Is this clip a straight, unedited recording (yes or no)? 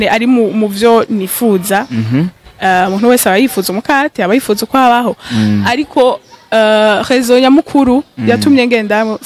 yes